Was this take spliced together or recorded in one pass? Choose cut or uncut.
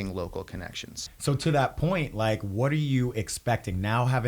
cut